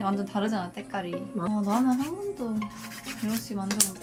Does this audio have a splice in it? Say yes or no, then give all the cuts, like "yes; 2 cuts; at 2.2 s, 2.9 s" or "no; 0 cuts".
no; 0 cuts